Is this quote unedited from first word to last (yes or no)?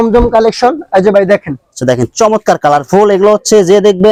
yes